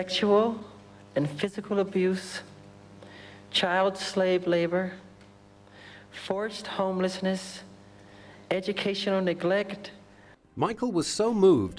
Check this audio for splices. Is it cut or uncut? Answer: cut